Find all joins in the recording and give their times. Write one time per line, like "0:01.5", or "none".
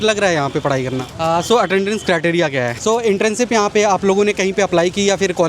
0:01.1
0:02.7